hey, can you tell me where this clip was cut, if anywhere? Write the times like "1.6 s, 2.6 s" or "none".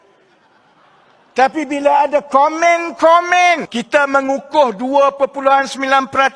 3.7 s

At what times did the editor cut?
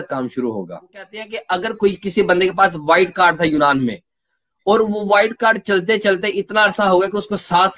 1.4 s

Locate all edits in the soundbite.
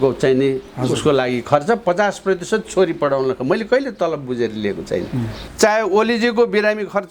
5.4 s

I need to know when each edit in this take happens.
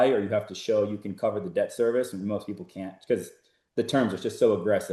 none

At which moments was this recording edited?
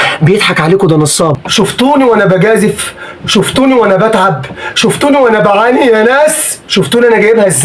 1.4 s

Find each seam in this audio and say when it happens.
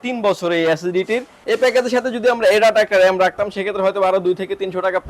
1.3 s

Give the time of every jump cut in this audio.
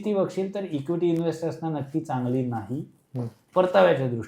none

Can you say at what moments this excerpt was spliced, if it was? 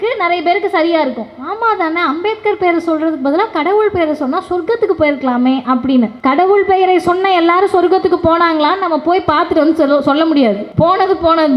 6.1 s, 10.7 s

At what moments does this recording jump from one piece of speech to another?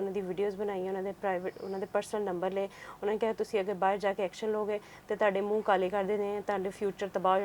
none

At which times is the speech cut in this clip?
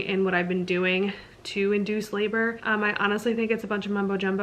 2.6 s

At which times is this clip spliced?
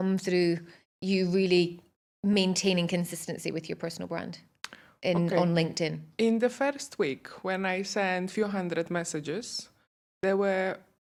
none

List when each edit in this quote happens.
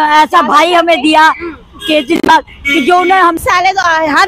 3.4 s

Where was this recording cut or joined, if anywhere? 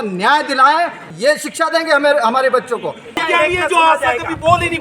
1.1 s, 3.2 s

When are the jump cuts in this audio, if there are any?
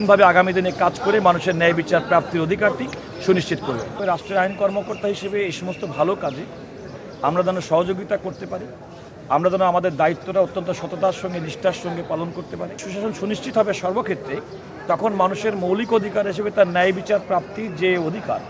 3.9 s, 12.9 s

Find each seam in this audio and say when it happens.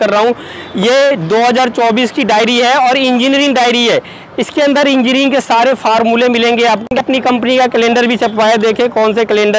6.9 s

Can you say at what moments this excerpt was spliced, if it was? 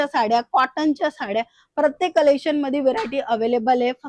none

